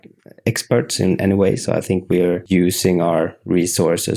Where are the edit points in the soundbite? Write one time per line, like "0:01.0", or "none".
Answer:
0:02.4